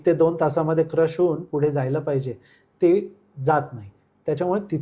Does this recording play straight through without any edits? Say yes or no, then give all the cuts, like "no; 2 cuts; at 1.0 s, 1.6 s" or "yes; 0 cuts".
yes; 0 cuts